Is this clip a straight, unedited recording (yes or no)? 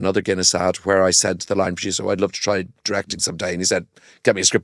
yes